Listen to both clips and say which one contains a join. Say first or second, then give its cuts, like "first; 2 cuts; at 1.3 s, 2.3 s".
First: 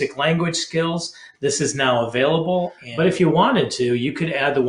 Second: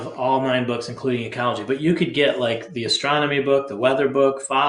first; 1 cut; at 2.8 s